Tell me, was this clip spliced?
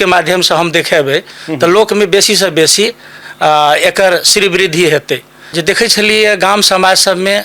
yes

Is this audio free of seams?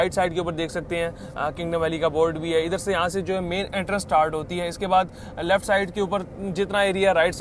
yes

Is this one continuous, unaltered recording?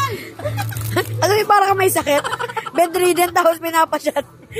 yes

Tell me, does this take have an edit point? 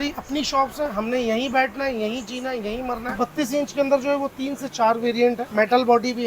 yes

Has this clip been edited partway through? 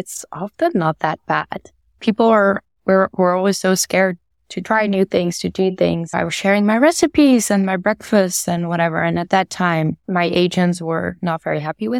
yes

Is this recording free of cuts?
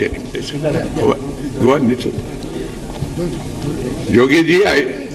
yes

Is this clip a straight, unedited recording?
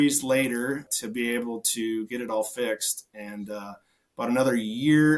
no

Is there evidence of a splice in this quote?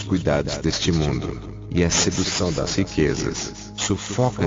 no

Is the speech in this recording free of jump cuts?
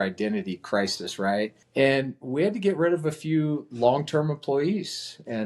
no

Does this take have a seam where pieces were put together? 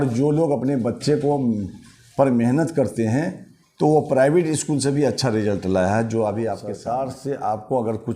yes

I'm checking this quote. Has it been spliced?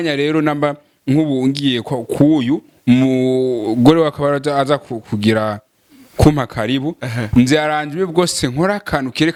no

